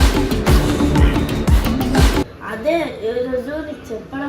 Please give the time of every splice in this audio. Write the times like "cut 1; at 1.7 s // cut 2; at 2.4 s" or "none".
cut 1; at 2.3 s

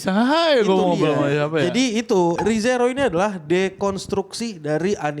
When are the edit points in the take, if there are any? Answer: cut 1; at 2.3 s

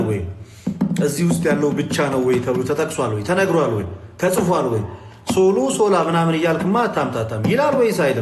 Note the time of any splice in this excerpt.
none

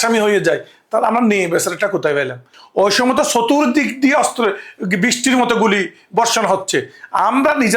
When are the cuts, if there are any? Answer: cut 1; at 2.5 s

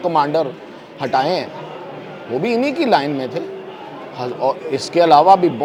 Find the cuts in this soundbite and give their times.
none

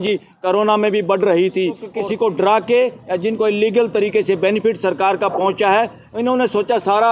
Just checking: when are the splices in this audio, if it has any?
cut 1; at 1.9 s

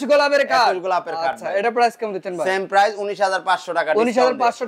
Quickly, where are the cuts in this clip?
none

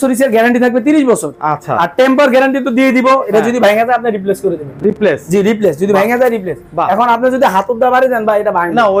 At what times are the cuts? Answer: none

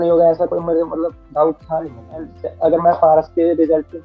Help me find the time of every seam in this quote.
cut 1; at 2.4 s

